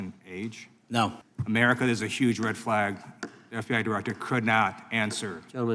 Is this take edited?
yes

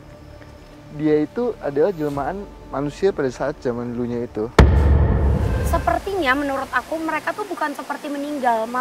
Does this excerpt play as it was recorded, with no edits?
no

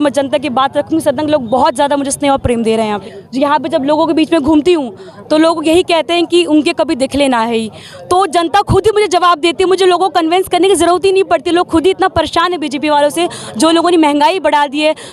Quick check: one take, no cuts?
no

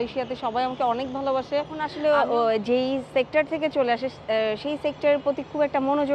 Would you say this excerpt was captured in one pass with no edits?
no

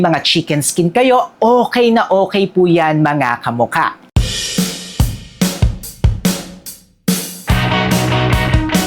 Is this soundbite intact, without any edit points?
yes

